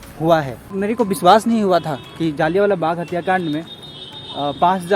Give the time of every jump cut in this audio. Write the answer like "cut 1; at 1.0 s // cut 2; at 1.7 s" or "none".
cut 1; at 0.9 s